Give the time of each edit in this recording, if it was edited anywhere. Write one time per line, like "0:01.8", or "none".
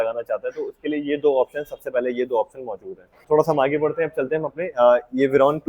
0:03.2